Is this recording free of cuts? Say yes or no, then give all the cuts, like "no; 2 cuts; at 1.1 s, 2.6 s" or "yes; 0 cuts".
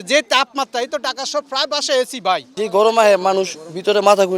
no; 1 cut; at 2.5 s